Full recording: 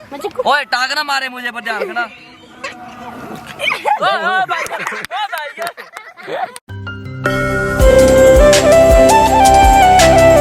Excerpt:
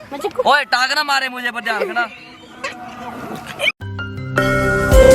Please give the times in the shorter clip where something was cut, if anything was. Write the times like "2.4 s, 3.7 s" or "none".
3.7 s